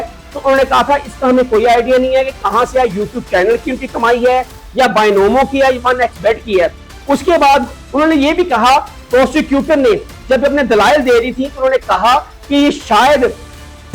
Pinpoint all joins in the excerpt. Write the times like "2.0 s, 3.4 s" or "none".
none